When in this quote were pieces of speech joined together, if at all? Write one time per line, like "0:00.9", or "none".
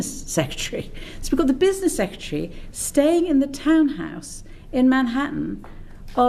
none